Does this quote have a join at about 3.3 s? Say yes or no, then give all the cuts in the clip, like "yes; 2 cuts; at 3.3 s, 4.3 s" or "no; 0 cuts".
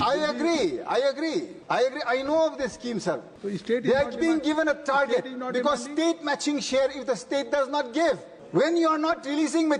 yes; 3 cuts; at 1.6 s, 3.3 s, 8.3 s